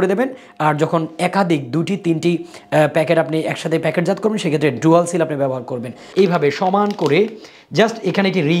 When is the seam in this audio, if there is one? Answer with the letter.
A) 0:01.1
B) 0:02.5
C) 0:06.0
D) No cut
C